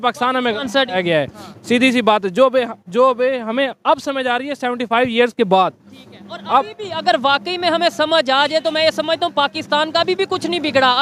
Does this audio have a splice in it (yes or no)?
no